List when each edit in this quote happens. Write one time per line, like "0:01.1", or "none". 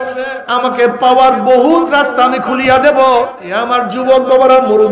0:03.4